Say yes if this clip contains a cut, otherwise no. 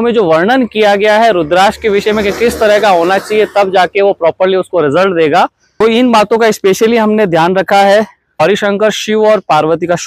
yes